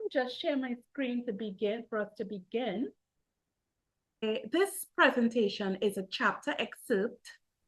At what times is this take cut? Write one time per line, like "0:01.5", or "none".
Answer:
0:04.2

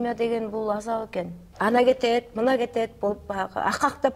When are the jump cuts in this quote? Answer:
0:01.4

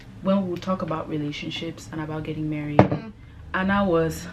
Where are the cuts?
none

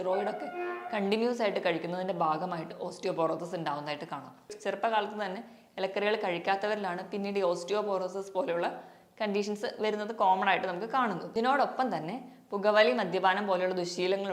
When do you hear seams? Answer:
0:04.5
0:11.2

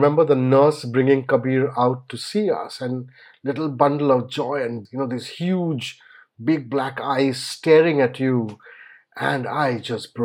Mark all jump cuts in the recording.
0:04.8

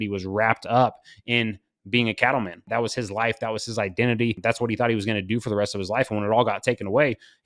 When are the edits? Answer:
0:02.6
0:04.4

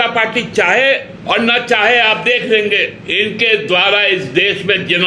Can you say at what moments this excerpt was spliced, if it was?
0:01.1
0:03.0

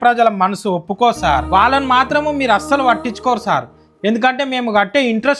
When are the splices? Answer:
0:01.4

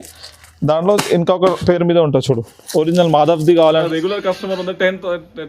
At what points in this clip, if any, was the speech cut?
0:03.9

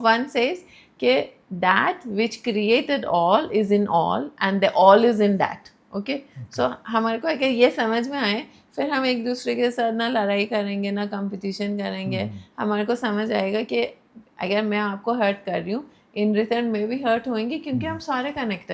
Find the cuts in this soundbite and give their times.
none

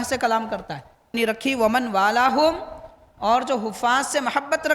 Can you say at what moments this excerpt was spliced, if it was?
0:01.2

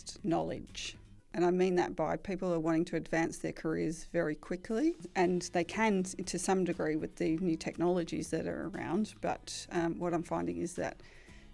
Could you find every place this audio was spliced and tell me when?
0:01.2
0:05.0

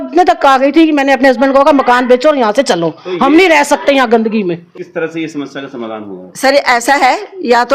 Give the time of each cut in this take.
0:04.6

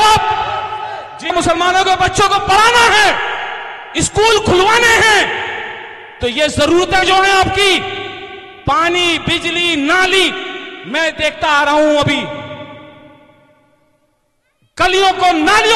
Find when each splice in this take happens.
0:01.3

